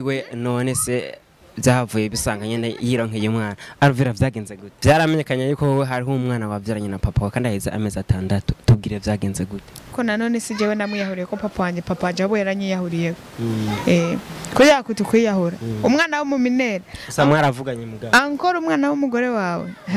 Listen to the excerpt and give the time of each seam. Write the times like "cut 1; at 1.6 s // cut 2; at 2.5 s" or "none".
cut 1; at 4.7 s // cut 2; at 9.8 s